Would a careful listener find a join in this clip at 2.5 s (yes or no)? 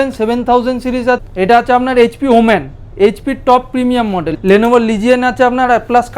no